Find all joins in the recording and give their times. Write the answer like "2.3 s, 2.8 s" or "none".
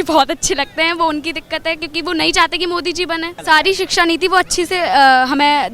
3.4 s